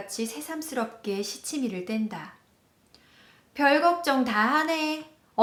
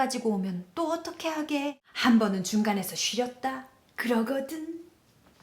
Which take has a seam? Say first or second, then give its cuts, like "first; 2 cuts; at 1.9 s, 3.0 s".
second; 1 cut; at 1.8 s